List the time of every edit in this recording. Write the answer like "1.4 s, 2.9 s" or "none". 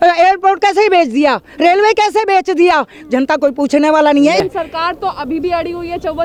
none